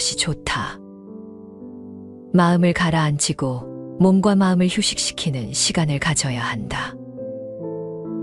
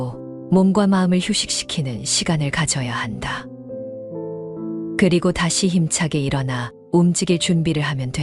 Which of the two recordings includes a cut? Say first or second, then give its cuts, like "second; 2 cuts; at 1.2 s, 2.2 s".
first; 2 cuts; at 0.7 s, 2.1 s